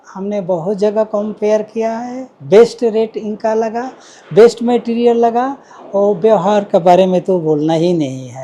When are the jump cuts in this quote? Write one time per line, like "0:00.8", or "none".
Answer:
none